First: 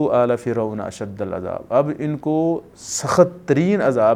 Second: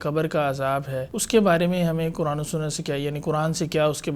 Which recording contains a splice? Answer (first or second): second